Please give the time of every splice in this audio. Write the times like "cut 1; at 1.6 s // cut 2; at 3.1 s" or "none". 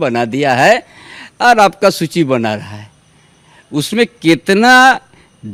none